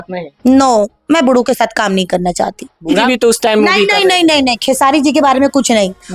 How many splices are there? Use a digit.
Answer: 1